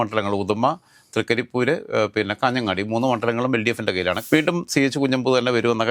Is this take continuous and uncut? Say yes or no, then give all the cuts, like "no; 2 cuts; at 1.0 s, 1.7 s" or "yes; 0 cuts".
no; 1 cut; at 4.2 s